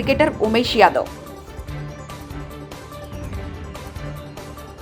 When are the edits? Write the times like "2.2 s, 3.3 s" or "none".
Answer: 1.1 s, 3.8 s